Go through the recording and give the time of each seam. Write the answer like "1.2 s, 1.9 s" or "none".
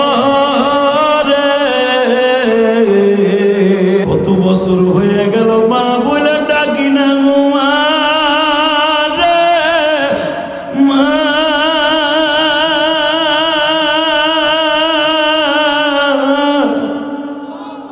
4.1 s